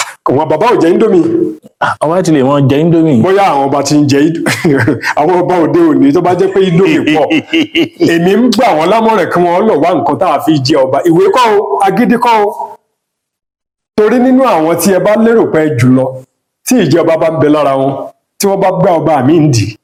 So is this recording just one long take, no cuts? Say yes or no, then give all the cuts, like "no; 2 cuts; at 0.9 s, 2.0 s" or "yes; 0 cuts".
yes; 0 cuts